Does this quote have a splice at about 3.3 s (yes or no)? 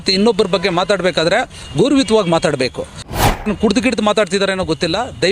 yes